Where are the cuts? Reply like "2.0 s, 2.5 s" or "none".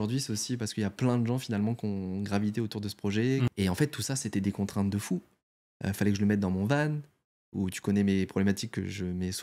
3.5 s